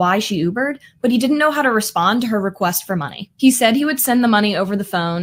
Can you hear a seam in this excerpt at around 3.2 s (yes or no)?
no